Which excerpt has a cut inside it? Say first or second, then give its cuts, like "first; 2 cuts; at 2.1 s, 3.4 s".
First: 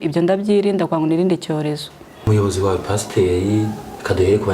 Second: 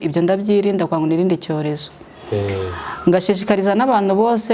first; 1 cut; at 2.3 s